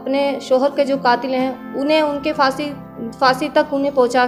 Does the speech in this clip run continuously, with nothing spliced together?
yes; 0 cuts

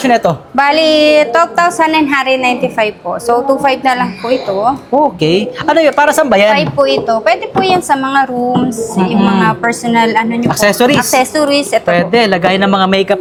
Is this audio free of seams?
yes; 0 cuts

